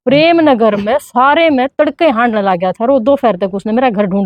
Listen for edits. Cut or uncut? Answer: uncut